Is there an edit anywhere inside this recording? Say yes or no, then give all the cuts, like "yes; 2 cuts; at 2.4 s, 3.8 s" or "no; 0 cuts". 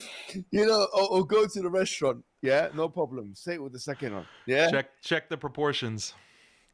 yes; 1 cut; at 2.3 s